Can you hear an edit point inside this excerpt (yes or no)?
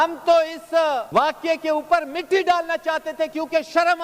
yes